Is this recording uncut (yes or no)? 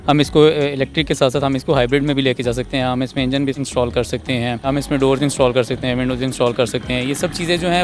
no